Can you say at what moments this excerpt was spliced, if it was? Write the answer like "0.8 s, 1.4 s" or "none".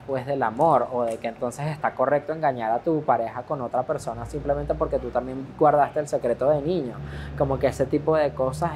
none